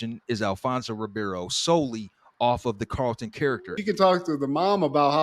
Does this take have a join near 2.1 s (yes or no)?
no